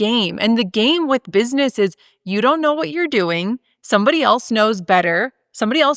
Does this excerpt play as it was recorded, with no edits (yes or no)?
yes